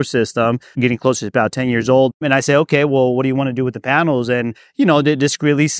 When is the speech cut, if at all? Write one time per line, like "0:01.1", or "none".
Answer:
0:00.8
0:02.2